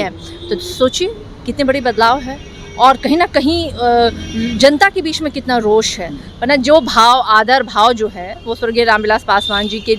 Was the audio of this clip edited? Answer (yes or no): no